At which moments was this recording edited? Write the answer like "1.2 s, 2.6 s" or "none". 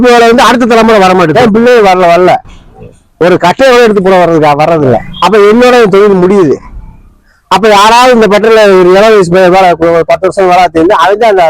1.4 s, 5.1 s